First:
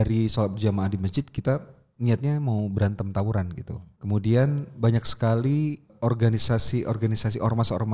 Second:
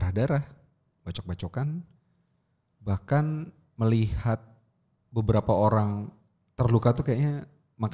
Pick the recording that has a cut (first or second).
first